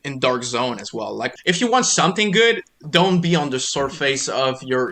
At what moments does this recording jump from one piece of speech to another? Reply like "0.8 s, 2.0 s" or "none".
1.3 s